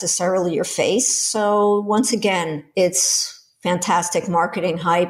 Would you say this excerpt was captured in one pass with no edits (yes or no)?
yes